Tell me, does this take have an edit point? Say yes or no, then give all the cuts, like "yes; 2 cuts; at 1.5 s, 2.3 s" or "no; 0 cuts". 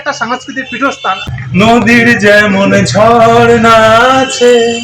yes; 1 cut; at 1.3 s